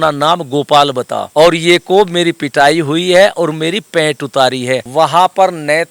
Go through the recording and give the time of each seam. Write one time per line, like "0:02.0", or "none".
0:01.2
0:04.9

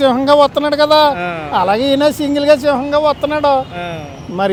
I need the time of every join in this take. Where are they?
none

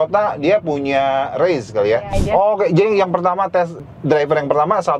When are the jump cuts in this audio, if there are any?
0:02.1
0:03.8

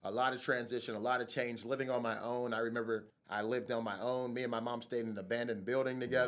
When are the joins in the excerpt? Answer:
0:03.2

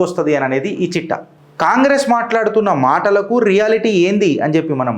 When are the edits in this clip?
none

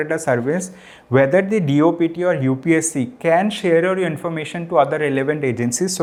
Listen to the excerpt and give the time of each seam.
none

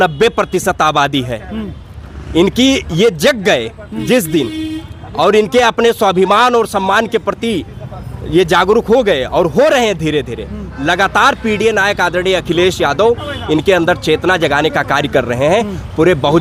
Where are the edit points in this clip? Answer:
none

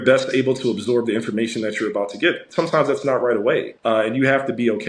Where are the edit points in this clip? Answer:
0:03.7

